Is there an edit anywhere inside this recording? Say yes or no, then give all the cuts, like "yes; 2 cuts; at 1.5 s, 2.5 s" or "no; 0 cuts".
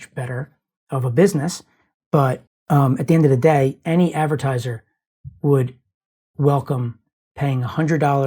yes; 1 cut; at 2.5 s